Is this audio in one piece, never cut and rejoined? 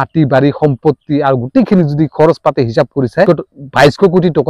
no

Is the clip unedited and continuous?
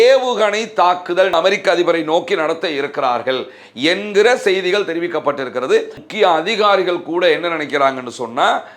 no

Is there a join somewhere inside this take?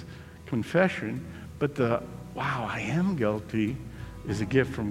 no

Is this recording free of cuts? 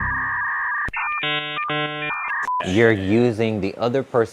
no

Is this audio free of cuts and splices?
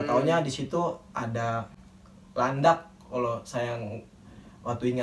yes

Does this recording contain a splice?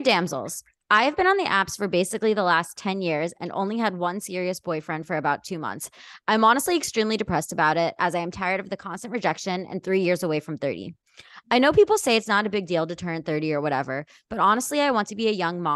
no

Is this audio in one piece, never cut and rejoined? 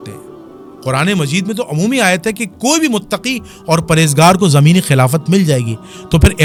yes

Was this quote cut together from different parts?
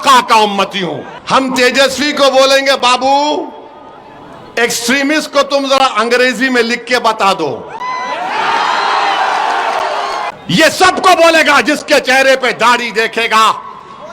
yes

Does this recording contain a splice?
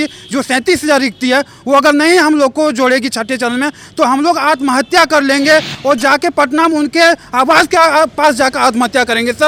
no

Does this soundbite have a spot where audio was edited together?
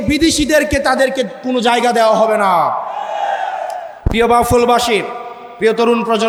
no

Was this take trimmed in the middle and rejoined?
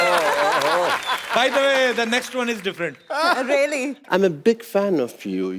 yes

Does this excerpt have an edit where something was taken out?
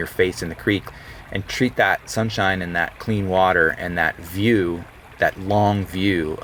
no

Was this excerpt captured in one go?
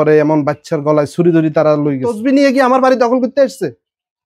no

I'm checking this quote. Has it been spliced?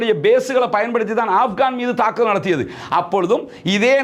no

